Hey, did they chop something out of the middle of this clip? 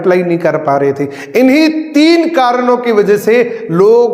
no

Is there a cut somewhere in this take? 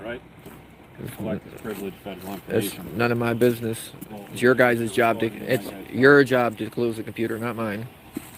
no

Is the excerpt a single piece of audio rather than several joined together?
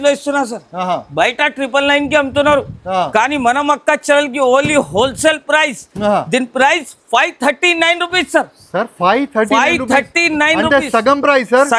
yes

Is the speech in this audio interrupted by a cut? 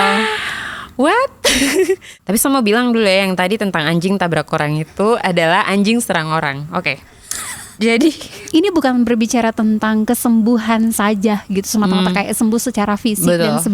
yes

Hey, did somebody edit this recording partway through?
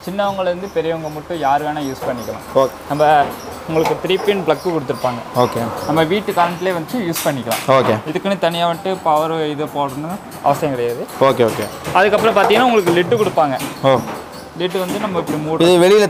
no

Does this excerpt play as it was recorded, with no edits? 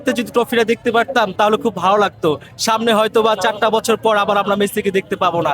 no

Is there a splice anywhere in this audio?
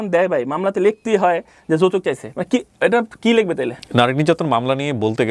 no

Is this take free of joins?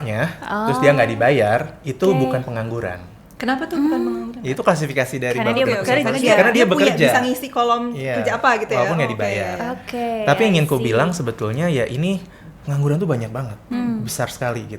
yes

